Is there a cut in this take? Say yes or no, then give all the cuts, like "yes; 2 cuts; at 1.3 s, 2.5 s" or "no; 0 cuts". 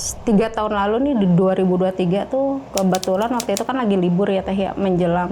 no; 0 cuts